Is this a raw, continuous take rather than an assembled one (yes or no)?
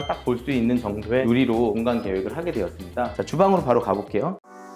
yes